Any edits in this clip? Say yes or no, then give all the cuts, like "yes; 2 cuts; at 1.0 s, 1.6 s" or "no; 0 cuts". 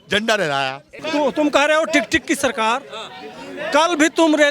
yes; 1 cut; at 1.0 s